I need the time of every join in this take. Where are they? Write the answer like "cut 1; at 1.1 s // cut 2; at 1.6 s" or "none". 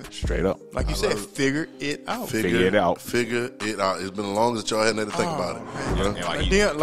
cut 1; at 5.9 s